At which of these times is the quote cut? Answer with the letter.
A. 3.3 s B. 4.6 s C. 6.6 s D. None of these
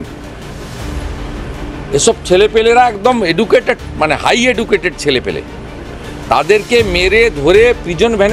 D